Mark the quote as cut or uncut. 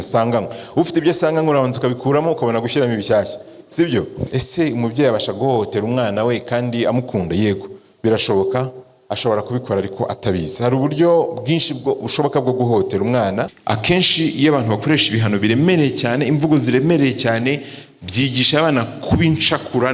cut